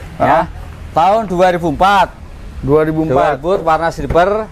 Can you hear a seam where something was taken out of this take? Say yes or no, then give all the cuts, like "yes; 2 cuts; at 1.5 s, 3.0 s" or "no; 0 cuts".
no; 0 cuts